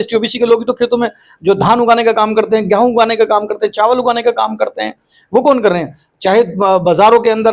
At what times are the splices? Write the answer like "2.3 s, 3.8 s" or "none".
none

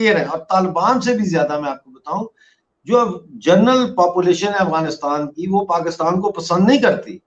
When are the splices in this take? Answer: none

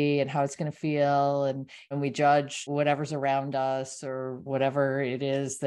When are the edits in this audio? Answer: 1.9 s, 2.7 s, 4.4 s

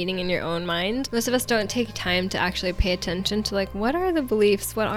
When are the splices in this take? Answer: 1.0 s

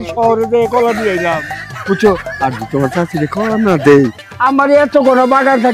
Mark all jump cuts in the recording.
4.2 s

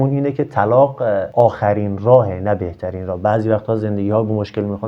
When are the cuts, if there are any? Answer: none

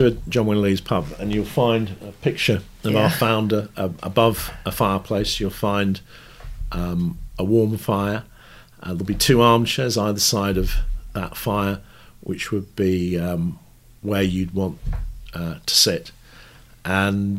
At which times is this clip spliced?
none

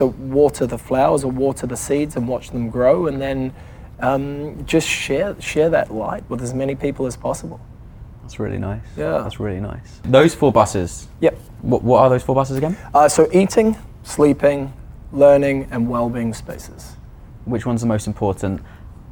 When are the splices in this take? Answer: none

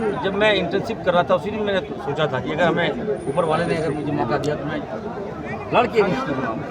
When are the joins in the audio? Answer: none

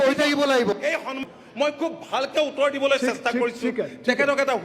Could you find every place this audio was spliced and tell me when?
1.3 s

